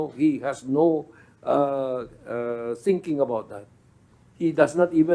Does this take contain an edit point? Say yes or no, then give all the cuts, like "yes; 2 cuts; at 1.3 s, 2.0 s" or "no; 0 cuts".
no; 0 cuts